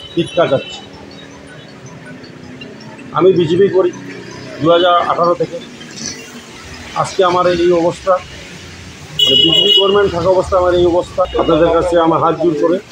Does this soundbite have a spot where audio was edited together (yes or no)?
yes